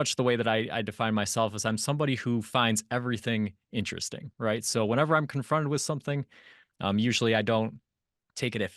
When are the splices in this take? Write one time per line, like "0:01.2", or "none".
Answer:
none